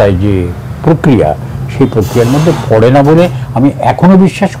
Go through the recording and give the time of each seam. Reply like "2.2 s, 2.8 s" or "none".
none